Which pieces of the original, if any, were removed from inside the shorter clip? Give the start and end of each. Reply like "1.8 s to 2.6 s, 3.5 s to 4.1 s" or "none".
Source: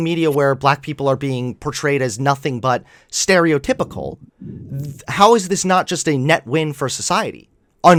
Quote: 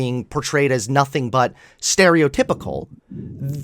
none